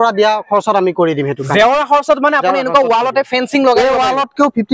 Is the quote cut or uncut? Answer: uncut